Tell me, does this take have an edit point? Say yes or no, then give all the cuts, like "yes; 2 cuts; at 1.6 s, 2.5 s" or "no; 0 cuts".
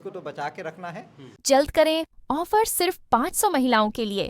no; 0 cuts